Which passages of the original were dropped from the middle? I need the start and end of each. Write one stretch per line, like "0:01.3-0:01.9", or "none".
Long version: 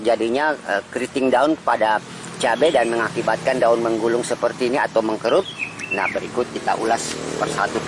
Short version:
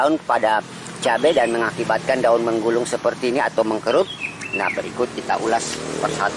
none